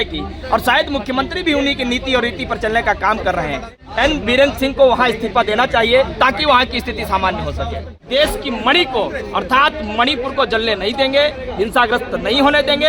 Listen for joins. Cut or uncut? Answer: cut